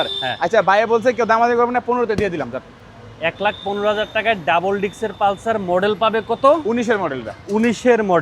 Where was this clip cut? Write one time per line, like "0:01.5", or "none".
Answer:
none